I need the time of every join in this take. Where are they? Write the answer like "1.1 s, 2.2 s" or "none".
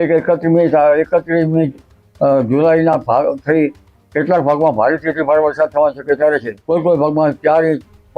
6.5 s